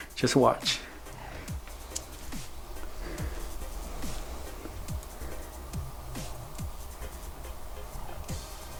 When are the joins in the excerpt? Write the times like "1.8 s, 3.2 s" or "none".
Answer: none